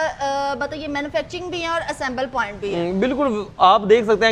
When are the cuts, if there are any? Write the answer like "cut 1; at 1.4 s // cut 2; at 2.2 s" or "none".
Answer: none